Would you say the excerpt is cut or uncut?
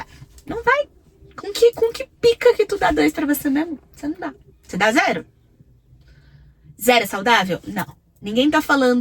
uncut